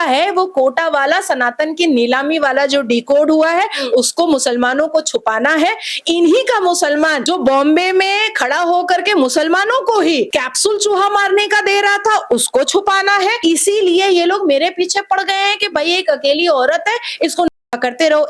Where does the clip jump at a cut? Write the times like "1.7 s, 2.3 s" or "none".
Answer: none